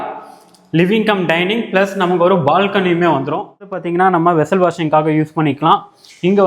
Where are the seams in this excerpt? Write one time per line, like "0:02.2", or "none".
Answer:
0:03.8